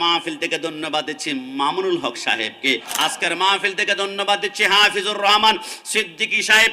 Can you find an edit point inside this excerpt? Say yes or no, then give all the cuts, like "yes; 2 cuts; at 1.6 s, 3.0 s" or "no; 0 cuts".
yes; 1 cut; at 2.9 s